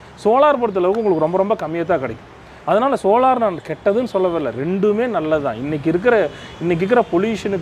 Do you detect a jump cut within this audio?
no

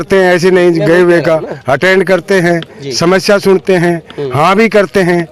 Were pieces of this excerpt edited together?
no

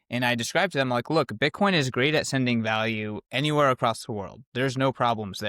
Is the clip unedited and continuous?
yes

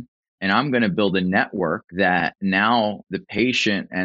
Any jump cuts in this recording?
yes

